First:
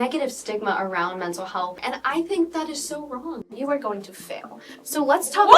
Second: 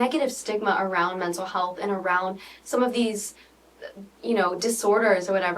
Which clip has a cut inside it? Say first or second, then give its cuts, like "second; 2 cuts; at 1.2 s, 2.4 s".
first; 2 cuts; at 1.8 s, 3.4 s